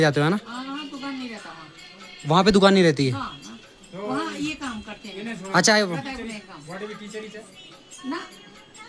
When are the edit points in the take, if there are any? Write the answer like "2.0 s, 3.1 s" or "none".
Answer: none